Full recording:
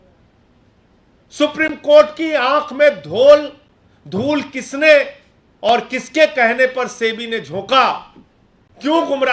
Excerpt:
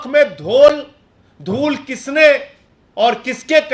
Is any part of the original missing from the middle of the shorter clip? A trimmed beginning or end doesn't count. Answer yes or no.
no